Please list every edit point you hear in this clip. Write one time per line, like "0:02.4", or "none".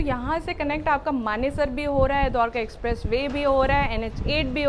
none